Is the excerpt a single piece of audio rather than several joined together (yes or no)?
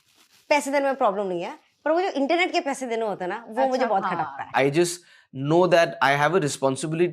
no